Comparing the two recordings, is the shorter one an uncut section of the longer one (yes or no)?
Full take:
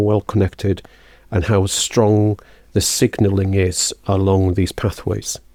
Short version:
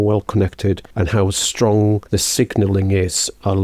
no